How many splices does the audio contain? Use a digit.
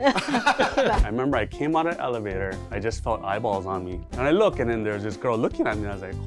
3